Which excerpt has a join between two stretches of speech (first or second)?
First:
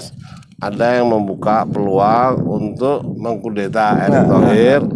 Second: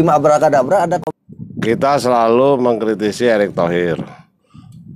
second